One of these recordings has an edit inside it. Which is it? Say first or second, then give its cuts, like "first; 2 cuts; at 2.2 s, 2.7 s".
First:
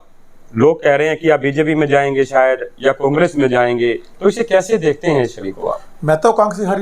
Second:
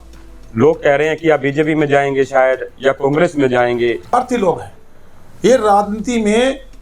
second; 1 cut; at 4.1 s